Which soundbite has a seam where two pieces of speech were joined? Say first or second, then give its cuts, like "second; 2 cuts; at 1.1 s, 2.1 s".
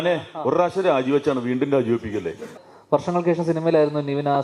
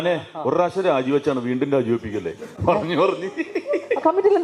first; 1 cut; at 2.5 s